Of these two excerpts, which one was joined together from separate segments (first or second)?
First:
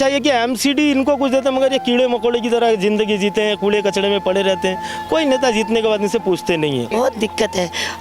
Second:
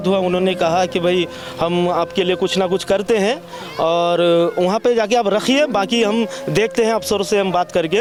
first